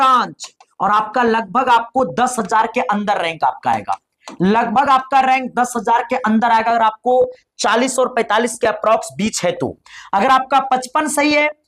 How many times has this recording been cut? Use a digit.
0